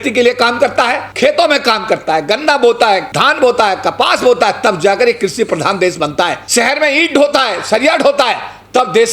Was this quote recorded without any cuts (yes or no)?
no